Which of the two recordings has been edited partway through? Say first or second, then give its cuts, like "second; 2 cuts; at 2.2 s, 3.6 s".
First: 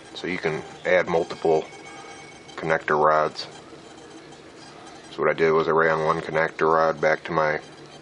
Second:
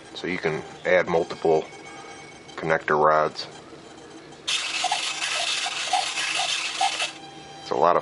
first; 1 cut; at 4.5 s